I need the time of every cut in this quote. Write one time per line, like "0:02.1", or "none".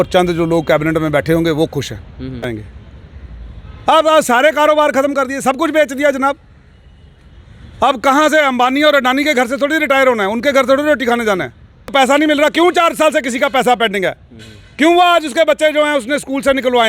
0:02.5
0:11.9